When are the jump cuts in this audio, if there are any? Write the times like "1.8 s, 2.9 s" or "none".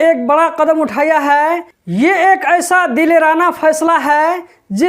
1.7 s